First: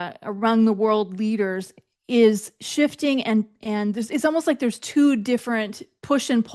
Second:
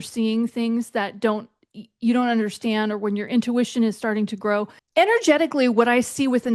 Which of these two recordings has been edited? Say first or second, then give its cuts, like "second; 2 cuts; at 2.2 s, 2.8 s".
second; 1 cut; at 4.8 s